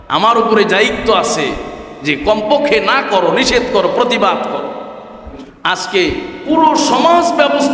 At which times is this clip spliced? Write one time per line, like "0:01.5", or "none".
0:05.4